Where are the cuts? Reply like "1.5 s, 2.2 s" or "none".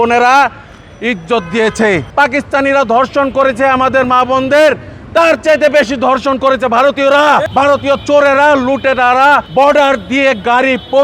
2.1 s, 7.5 s, 9.5 s